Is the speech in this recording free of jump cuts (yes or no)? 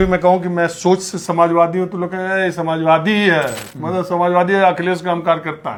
yes